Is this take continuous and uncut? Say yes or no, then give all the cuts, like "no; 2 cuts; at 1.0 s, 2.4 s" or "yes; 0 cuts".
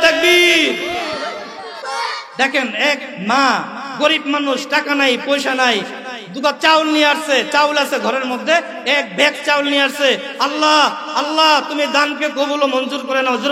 no; 1 cut; at 1.8 s